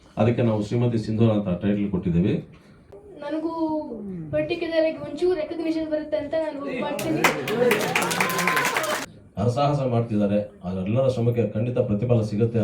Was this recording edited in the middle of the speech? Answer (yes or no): yes